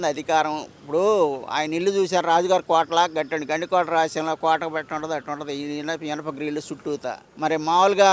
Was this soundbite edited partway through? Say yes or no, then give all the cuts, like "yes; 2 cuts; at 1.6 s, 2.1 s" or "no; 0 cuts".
no; 0 cuts